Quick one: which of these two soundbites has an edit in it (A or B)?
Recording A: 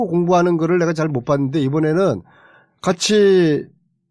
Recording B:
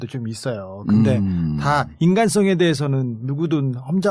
B